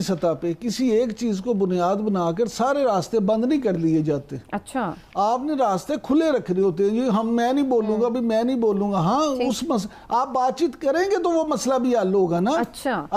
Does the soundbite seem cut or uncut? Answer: uncut